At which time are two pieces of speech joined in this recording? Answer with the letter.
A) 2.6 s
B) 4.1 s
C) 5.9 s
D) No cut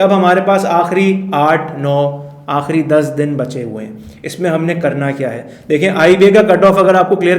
D